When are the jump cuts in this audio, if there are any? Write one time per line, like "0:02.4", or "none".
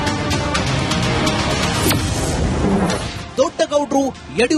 none